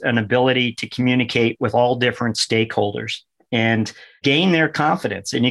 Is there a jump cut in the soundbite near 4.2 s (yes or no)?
yes